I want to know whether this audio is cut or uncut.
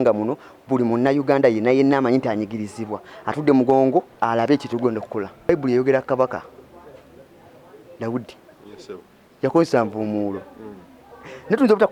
cut